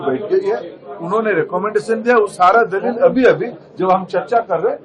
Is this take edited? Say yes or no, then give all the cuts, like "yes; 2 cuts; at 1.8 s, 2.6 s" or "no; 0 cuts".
no; 0 cuts